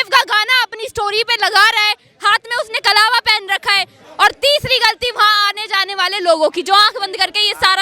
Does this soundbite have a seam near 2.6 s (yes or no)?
no